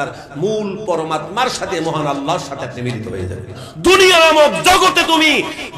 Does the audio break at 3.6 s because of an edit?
yes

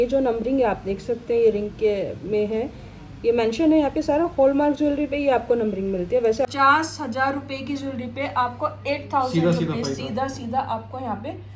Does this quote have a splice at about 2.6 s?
no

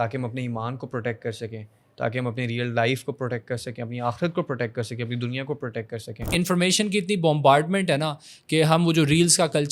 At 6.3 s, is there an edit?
yes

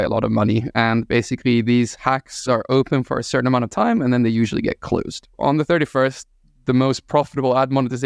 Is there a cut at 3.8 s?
no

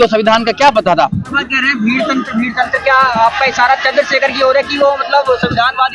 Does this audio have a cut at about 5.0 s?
no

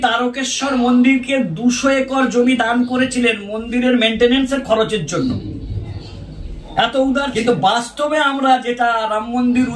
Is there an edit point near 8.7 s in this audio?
no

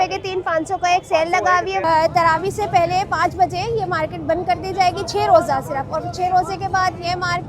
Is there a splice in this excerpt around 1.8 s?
yes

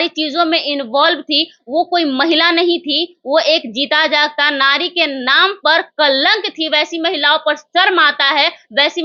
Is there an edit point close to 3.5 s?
no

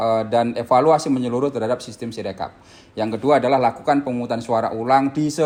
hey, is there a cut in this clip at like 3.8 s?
no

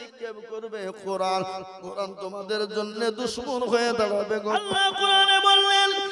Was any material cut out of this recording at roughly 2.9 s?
no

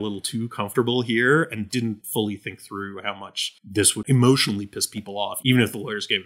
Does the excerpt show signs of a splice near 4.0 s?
yes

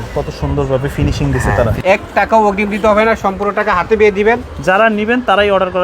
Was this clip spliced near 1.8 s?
yes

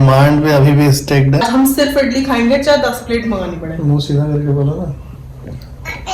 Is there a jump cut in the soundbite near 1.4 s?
yes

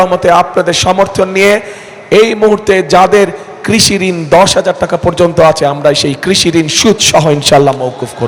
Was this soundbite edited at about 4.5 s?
no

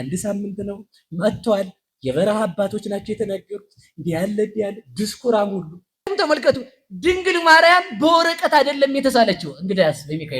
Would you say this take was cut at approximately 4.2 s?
no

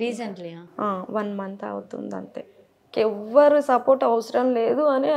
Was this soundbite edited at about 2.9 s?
yes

